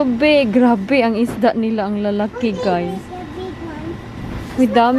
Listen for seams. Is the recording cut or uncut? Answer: uncut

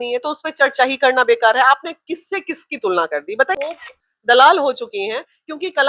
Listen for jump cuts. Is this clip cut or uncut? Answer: cut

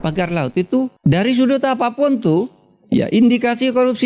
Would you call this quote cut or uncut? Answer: cut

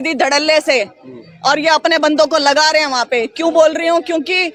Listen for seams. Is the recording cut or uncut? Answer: uncut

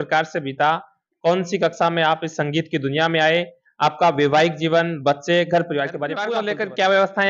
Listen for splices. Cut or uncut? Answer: cut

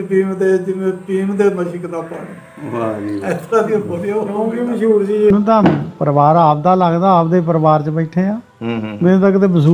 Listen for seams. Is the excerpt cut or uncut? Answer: cut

